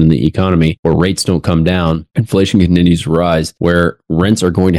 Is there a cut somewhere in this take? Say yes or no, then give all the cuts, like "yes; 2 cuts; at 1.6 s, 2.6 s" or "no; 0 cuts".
yes; 3 cuts; at 0.8 s, 2.1 s, 3.5 s